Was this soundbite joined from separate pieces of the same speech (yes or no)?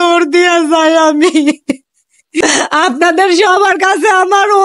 yes